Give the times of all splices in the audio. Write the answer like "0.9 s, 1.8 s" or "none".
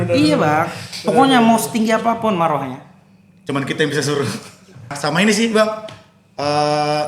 5.0 s